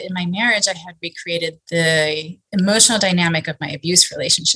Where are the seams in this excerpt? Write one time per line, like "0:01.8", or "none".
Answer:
0:02.3